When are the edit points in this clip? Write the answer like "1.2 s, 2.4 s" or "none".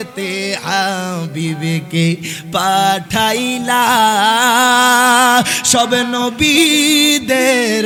none

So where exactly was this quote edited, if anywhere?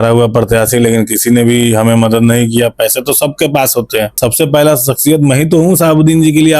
4.2 s

